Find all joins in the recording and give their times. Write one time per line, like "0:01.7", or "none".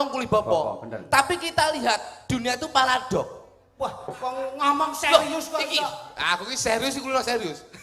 0:04.0